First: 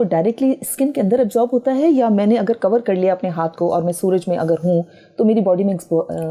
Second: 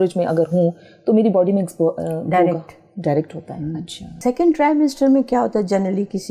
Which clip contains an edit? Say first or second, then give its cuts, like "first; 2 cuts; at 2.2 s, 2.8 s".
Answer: second; 1 cut; at 4.1 s